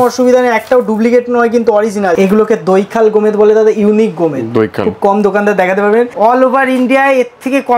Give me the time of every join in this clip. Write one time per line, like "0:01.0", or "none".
0:02.2
0:06.1